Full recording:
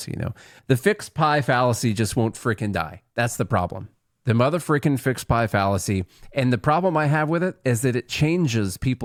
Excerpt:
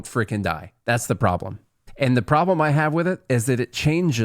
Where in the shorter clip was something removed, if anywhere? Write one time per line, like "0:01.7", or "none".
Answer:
0:01.8

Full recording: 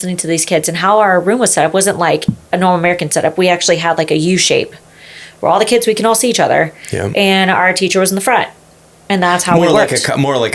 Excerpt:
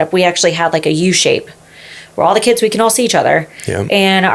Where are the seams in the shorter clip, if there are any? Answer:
none

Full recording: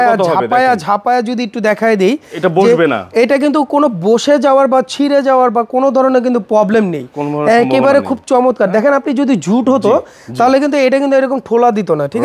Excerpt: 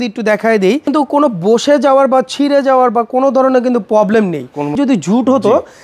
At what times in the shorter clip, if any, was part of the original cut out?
0:00.9
0:04.7

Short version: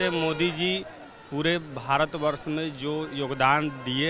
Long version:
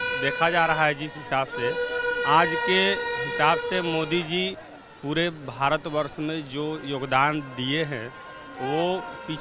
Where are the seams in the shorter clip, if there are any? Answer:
none

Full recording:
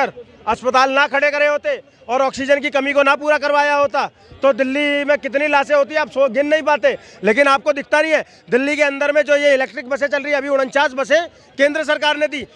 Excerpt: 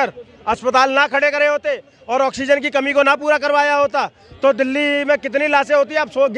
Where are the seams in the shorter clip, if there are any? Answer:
none

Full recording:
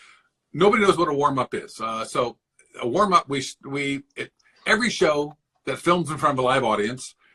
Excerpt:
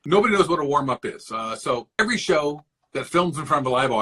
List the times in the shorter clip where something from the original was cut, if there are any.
0:02.0

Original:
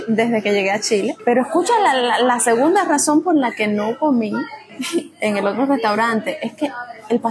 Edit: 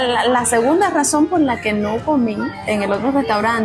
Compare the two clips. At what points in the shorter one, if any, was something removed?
0:02.6

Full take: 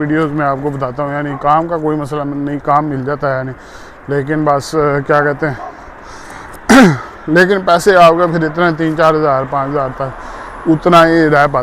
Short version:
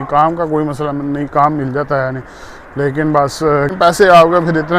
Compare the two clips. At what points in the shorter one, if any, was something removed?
0:03.7

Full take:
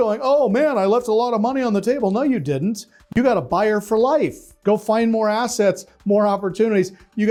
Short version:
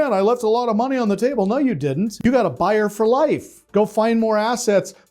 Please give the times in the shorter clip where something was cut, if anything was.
0:02.1

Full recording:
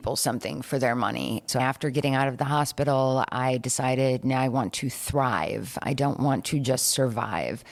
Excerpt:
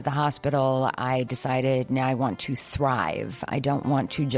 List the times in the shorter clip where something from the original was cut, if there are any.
none

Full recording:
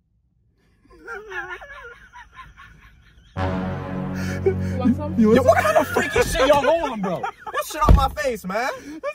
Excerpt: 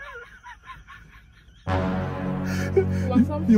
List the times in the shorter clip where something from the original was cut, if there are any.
none

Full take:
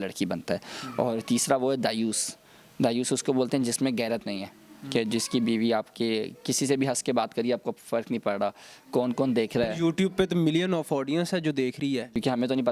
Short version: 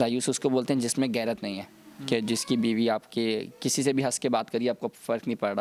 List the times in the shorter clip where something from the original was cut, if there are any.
none

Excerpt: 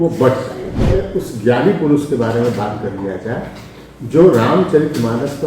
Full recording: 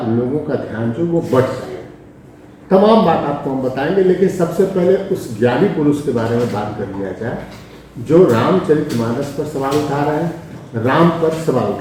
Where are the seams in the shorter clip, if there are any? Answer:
0:00.9

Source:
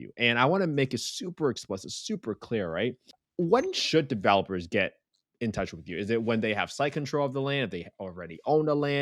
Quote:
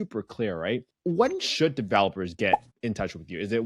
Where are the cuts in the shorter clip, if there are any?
0:00.9
0:02.7

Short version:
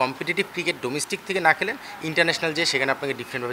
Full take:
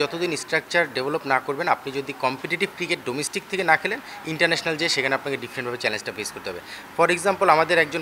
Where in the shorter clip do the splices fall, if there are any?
none

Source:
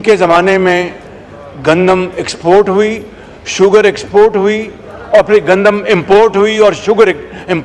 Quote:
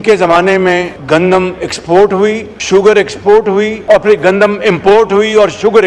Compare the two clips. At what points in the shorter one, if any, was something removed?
0:00.9
0:02.5
0:03.8

